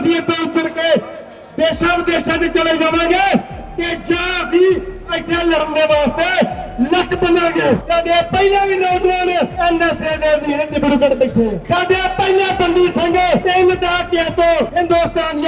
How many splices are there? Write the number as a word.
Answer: five